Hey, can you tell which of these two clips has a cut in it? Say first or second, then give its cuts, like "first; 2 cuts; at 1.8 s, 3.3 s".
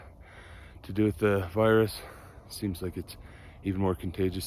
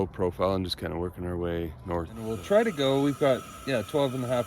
second; 1 cut; at 2.3 s